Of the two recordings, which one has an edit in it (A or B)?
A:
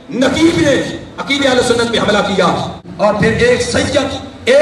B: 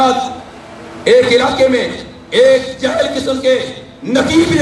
A